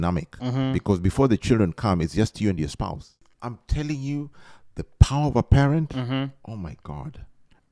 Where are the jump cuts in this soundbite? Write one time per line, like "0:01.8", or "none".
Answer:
0:03.2